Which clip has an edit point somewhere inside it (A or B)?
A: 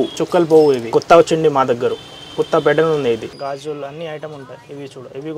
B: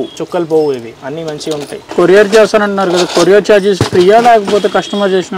A